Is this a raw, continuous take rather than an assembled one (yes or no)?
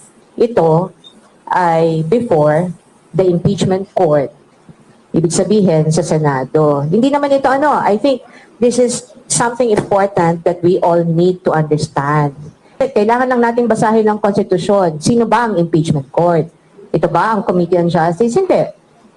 no